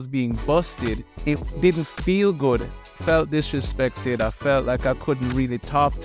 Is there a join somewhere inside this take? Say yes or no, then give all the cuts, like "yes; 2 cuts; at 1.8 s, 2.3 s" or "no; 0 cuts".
yes; 2 cuts; at 1.1 s, 3.0 s